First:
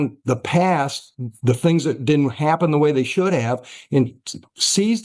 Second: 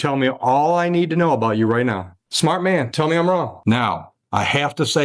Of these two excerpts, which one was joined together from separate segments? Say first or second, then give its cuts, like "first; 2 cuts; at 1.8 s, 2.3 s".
second; 2 cuts; at 2.3 s, 3.6 s